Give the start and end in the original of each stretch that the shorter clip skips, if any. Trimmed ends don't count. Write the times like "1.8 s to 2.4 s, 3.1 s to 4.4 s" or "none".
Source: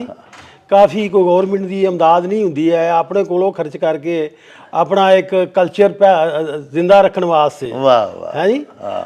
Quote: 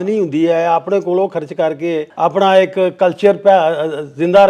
4.3 s to 4.6 s